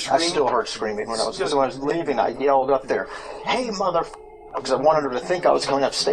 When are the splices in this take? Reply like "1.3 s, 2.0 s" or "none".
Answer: 1.4 s, 4.6 s